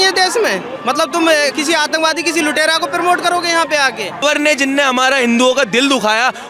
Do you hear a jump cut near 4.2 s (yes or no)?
yes